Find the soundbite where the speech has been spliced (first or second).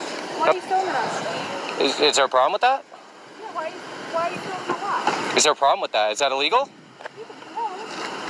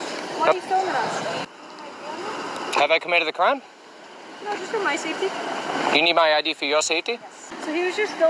second